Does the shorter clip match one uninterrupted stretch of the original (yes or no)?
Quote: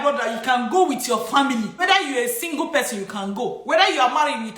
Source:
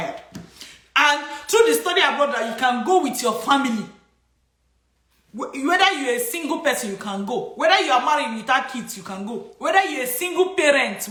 no